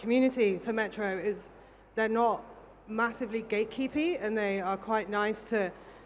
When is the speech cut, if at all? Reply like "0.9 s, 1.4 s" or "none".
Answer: none